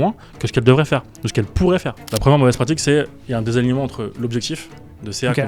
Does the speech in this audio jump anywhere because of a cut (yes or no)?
yes